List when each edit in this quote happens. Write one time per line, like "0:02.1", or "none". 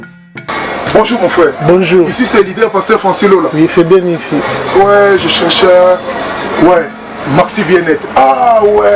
none

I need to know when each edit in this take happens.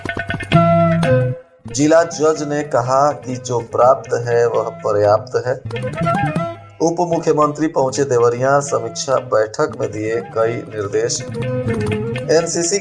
0:01.4

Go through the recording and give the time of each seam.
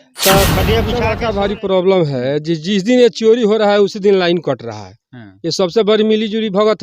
0:01.0

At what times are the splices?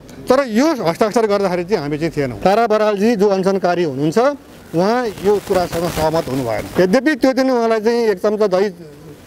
0:02.3
0:06.7

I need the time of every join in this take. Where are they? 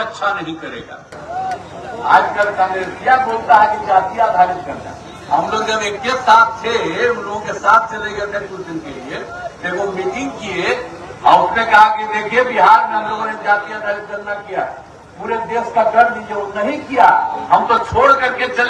0:01.2

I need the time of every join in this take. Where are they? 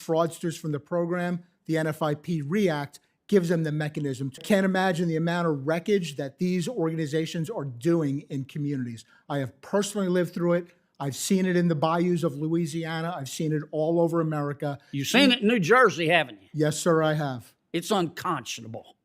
0:04.4

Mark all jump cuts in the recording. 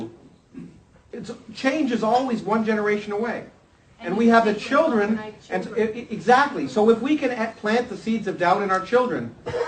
0:05.9

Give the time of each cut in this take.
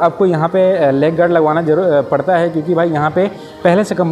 none

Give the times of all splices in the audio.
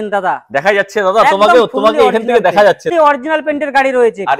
0:02.9

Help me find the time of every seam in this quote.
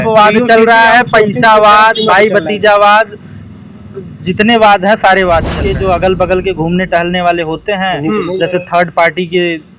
0:05.6

